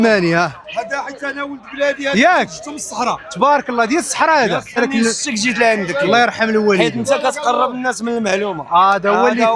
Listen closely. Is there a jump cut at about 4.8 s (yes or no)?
yes